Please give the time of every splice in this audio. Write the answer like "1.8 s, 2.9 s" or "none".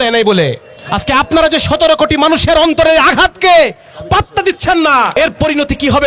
5.2 s